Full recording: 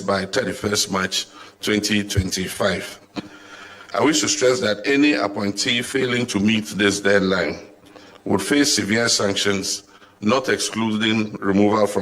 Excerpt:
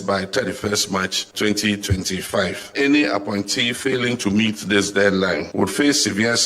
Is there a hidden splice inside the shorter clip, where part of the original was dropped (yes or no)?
yes